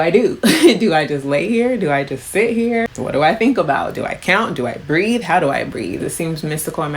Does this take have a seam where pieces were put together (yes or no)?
yes